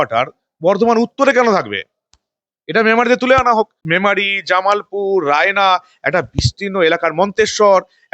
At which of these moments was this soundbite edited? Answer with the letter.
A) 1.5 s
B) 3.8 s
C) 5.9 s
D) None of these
B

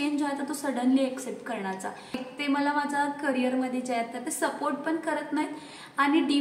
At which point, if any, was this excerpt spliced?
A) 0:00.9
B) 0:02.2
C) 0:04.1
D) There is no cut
B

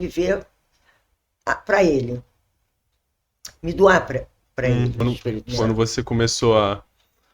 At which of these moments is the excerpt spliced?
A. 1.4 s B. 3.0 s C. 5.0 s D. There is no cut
C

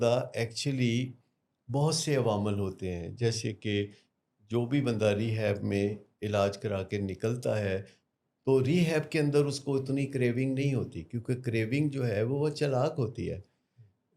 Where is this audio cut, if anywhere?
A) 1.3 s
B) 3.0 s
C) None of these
C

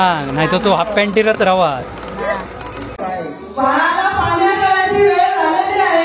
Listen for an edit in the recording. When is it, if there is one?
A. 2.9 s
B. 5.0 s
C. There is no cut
A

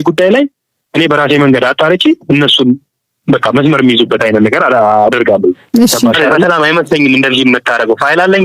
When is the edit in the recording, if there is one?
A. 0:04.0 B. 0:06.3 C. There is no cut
B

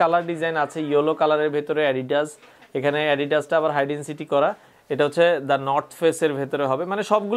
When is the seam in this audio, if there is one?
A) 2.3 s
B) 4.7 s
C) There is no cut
B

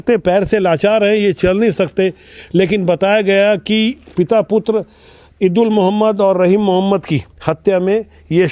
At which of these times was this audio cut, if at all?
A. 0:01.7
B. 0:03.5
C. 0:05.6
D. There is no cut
D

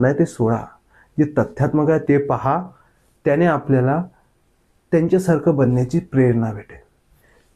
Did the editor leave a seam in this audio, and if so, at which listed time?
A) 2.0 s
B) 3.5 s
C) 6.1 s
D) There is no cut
A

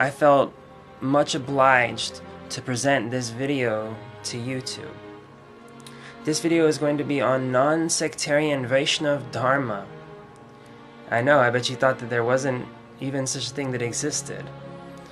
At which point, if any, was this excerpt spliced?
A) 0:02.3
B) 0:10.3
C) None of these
B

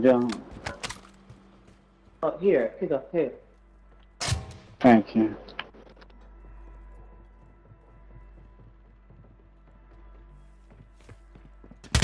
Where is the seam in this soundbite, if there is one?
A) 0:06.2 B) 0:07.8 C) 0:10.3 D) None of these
D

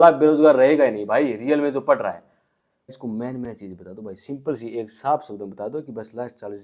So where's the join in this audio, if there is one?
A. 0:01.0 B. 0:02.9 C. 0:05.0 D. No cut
B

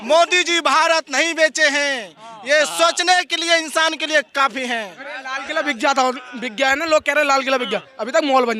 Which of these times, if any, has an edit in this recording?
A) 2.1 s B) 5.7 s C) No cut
C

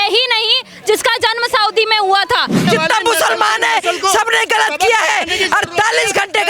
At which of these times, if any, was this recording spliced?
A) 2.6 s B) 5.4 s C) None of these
A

